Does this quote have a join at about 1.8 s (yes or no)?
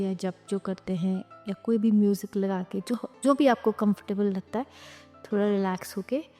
no